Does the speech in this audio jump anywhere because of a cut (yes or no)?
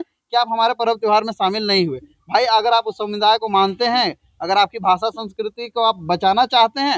no